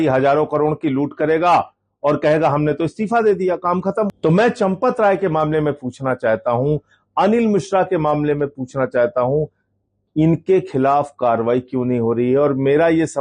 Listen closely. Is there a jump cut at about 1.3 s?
no; 1 cut; at 4.1 s

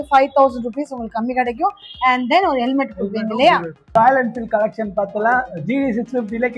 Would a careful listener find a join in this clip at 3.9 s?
yes; 1 cut; at 3.9 s

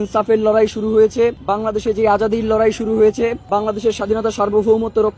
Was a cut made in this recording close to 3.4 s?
yes; 2 cuts; at 1.4 s, 3.4 s

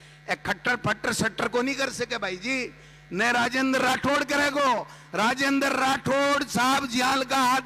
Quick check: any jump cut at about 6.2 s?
no; 0 cuts

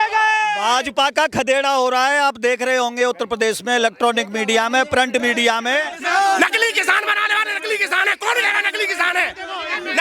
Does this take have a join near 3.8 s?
no; 1 cut; at 5.9 s

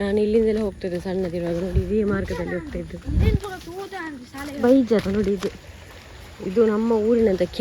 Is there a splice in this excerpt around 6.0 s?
no; 1 cut; at 4.6 s

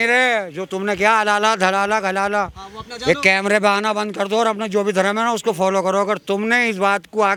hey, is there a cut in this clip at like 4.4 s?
no; 0 cuts

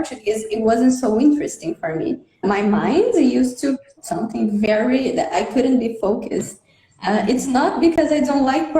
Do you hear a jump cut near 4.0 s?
yes; 2 cuts; at 2.4 s, 4.0 s

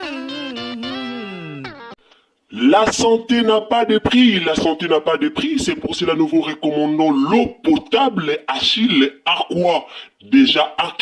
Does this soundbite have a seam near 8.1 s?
no; 1 cut; at 1.9 s

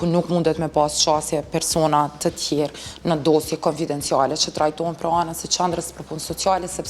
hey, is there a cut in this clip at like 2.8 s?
no; 0 cuts

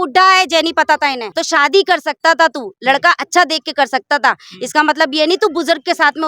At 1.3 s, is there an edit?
yes; 1 cut; at 1.3 s

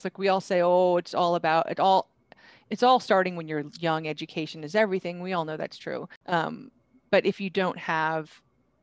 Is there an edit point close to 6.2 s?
yes; 1 cut; at 6.2 s

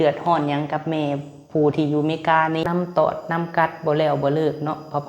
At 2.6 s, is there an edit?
yes; 1 cut; at 2.6 s

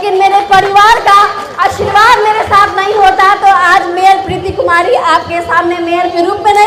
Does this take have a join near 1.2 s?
no; 0 cuts

